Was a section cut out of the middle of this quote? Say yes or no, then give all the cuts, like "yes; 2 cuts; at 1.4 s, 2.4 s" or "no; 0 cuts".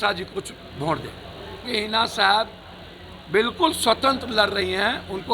yes; 1 cut; at 1.6 s